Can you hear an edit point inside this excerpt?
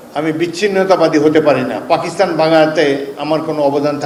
no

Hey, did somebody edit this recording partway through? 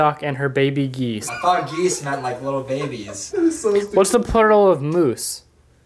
yes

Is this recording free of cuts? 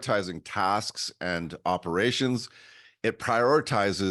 yes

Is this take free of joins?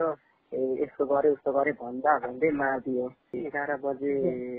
no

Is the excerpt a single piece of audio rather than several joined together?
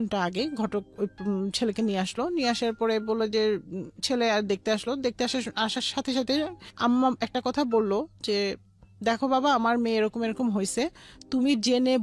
yes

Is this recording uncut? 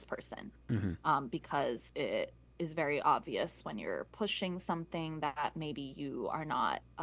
no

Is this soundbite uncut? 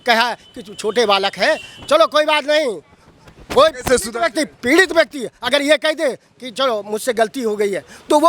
yes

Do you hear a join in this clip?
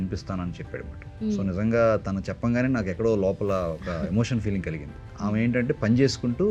no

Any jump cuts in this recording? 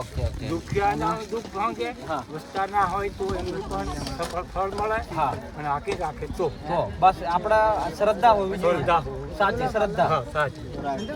no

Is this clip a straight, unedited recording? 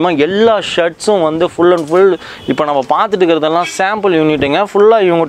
yes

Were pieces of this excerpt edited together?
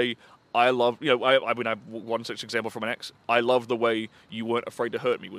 no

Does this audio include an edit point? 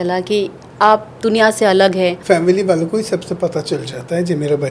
yes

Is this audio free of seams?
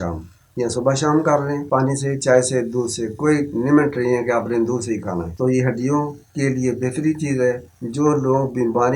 no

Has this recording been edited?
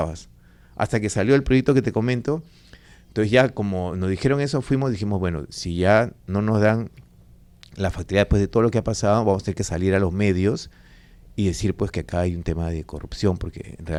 no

